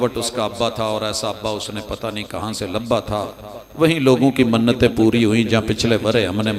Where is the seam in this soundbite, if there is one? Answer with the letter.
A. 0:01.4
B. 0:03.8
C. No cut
C